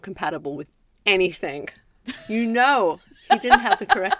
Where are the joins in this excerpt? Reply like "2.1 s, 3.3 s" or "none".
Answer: 3.1 s